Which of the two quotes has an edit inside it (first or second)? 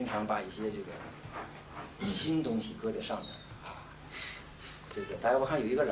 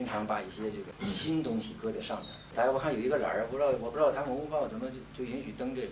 second